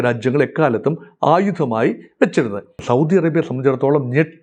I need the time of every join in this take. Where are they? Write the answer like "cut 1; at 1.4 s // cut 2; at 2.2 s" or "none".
cut 1; at 2.8 s